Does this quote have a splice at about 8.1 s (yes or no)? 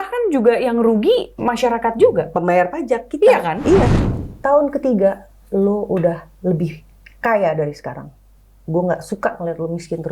no